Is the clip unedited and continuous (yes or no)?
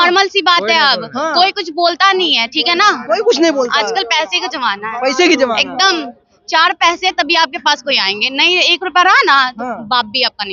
yes